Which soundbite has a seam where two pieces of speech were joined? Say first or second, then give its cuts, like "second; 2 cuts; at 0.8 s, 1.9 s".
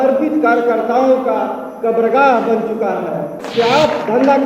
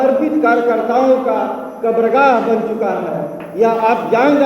first; 1 cut; at 3.4 s